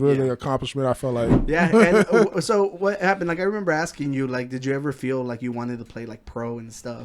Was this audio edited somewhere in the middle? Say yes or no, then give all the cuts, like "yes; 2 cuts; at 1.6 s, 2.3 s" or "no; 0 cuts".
yes; 1 cut; at 1.3 s